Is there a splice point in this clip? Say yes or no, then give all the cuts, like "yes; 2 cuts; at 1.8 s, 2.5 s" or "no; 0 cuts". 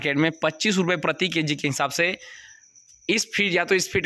no; 0 cuts